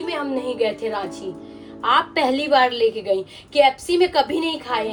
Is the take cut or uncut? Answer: uncut